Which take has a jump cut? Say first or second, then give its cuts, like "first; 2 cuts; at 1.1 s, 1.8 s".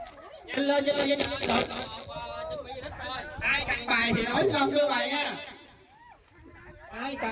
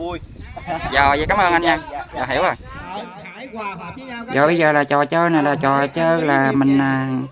second; 2 cuts; at 2.9 s, 4.3 s